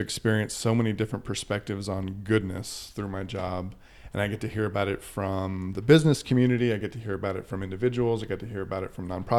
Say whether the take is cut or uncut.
uncut